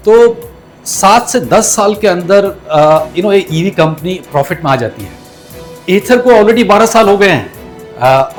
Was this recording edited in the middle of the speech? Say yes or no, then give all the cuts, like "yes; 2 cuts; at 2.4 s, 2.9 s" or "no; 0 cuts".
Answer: no; 0 cuts